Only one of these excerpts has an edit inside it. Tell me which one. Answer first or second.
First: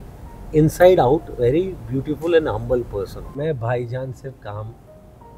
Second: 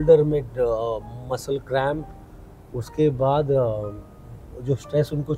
first